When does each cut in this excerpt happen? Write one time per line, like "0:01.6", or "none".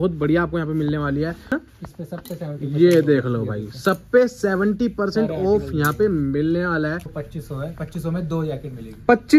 0:01.6
0:07.1